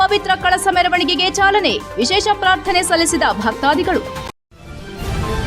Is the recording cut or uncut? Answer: cut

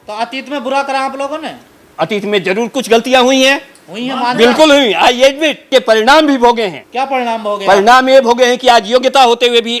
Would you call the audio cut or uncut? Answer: cut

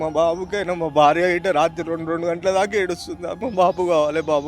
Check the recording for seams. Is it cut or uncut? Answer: cut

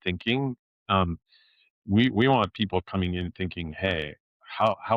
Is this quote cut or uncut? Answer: uncut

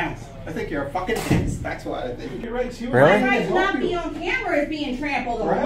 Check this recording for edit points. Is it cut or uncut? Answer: cut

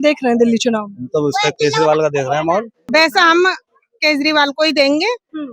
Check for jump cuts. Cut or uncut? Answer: cut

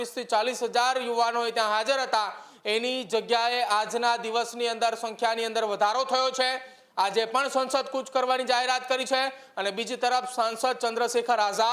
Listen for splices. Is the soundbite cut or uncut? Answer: uncut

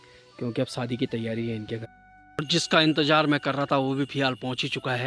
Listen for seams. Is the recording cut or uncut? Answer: cut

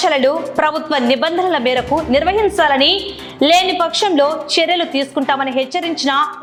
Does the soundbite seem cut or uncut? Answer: uncut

